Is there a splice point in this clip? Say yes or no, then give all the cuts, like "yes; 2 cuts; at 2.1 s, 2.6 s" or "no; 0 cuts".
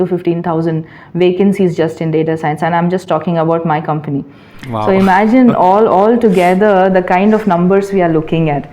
no; 0 cuts